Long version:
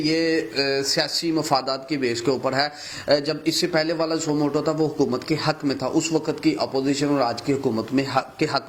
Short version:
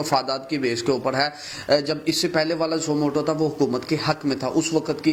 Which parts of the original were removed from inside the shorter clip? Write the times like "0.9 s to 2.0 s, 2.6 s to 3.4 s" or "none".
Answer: none